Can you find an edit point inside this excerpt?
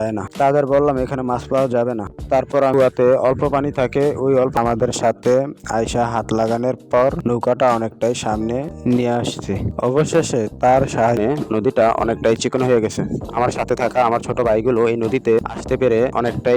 yes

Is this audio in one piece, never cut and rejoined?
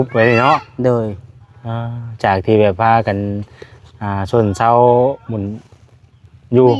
yes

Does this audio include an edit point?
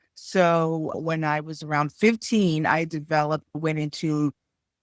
yes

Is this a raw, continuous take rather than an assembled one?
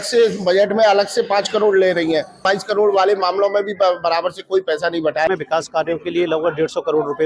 no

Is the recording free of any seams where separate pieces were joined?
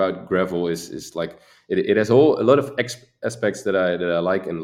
yes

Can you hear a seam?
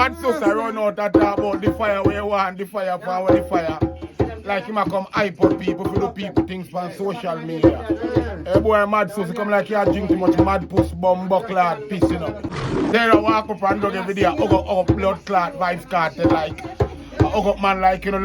yes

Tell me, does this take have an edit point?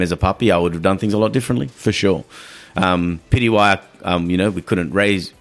no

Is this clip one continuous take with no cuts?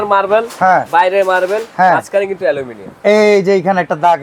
yes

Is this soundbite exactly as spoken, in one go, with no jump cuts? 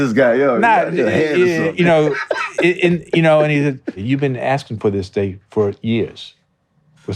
no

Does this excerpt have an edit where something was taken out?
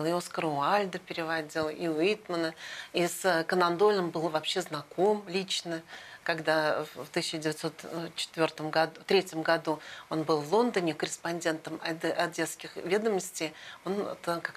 no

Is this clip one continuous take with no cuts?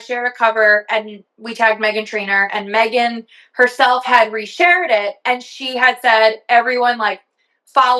yes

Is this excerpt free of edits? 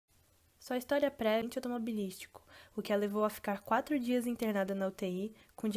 no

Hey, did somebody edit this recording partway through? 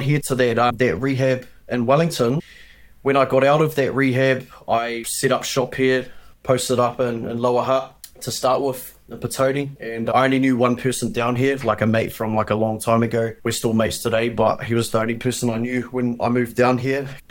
no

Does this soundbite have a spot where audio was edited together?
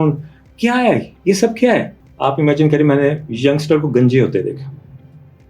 yes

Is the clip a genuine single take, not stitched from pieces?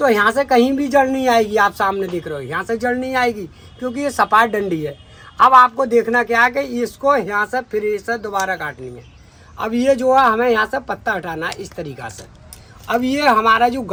yes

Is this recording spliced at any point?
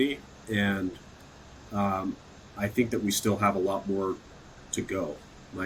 no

